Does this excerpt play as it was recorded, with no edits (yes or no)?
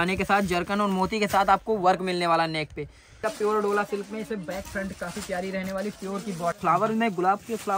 no